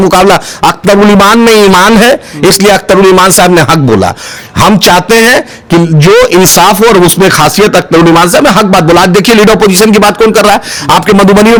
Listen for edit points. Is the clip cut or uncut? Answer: uncut